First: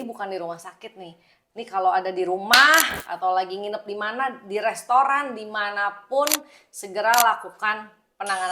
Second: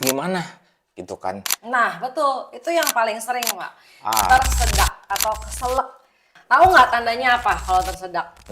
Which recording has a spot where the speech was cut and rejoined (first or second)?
second